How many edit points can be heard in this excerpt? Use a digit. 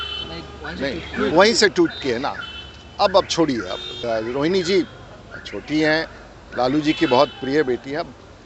1